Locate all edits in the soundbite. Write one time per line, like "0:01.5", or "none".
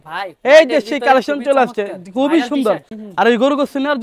0:03.0